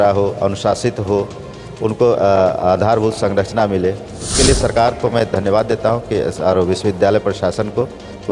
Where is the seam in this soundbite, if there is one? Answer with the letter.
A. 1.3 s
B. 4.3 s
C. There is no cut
B